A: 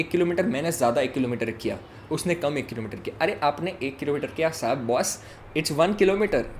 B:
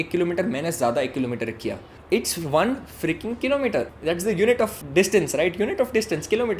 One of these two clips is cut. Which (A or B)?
B